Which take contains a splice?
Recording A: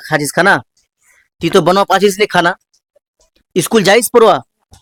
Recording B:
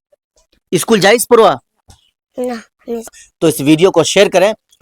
B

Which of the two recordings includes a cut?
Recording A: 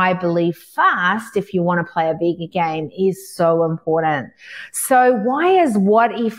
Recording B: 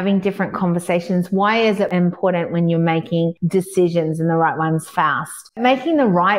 B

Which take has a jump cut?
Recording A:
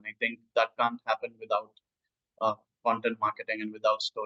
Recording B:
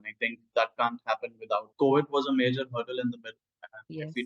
B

